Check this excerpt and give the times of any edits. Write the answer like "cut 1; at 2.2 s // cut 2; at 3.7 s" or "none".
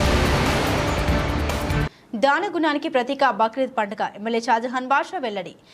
cut 1; at 1.8 s